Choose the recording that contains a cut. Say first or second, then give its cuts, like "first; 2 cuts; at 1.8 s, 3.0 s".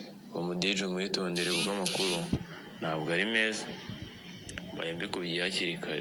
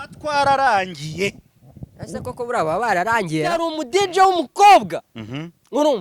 second; 1 cut; at 3.7 s